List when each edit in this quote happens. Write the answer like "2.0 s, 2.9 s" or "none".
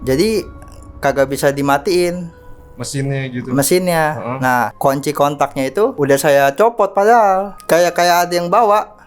4.7 s, 5.9 s, 7.5 s